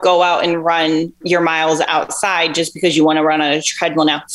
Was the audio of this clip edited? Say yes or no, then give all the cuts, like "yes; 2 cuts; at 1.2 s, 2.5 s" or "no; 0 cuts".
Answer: yes; 1 cut; at 1.2 s